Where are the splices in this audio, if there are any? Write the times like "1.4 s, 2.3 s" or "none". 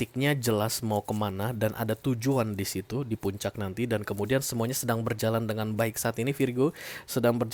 none